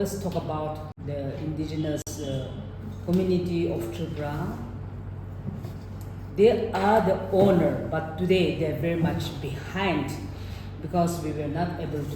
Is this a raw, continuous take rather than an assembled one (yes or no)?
no